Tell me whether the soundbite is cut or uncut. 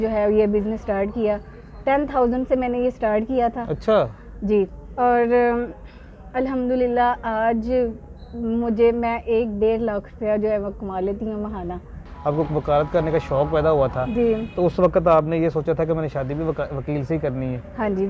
cut